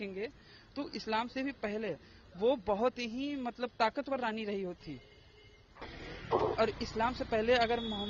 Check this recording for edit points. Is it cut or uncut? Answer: cut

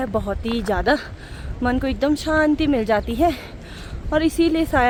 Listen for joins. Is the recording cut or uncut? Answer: uncut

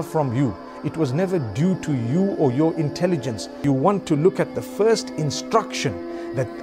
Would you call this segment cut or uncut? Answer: cut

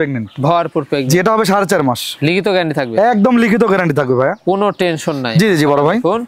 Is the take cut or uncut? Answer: uncut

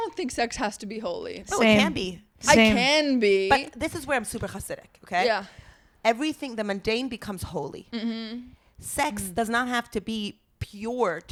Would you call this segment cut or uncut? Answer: uncut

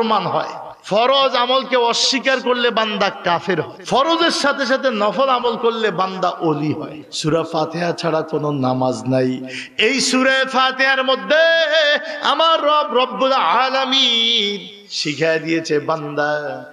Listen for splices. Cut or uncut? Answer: cut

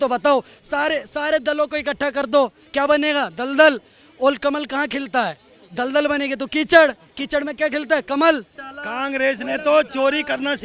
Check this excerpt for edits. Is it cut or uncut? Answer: cut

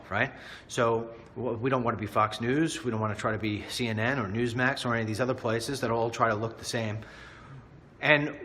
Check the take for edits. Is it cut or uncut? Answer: cut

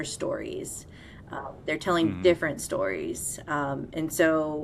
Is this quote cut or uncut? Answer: uncut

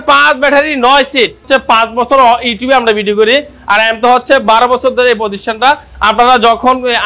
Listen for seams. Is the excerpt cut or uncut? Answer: cut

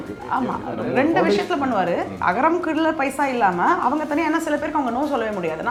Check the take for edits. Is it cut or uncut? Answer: uncut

